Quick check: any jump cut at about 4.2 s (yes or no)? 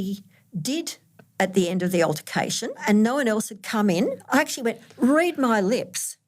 yes